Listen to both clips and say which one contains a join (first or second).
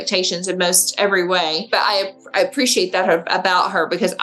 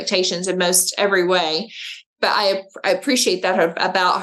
first